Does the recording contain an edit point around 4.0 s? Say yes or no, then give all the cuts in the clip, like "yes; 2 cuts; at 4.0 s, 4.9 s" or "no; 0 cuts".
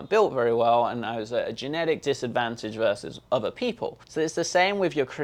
yes; 2 cuts; at 3.1 s, 4.0 s